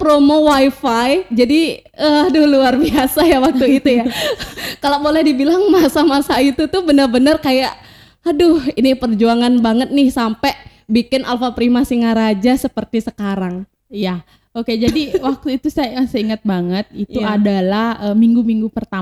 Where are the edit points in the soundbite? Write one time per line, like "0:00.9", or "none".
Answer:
none